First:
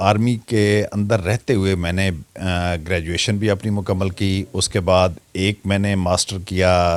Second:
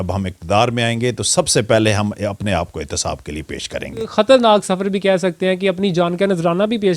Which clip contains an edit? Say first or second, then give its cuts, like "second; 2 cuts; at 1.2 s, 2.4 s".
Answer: second; 1 cut; at 4.1 s